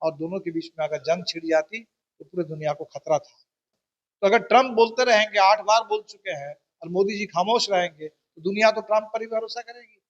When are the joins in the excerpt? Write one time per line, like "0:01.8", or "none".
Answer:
0:03.6